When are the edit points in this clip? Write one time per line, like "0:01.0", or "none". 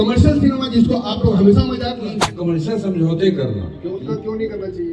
0:02.0